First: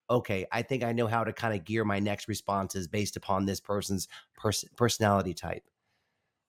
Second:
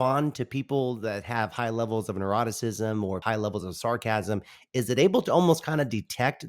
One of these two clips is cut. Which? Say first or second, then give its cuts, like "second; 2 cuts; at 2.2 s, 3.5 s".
second; 1 cut; at 3.2 s